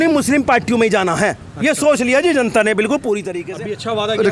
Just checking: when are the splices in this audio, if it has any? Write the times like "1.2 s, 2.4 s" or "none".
3.4 s